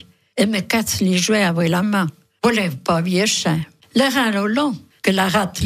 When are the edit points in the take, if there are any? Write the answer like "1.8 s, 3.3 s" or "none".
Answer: 3.7 s